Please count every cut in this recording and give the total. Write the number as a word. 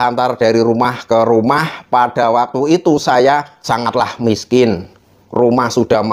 zero